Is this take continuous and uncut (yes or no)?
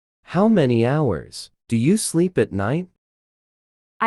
yes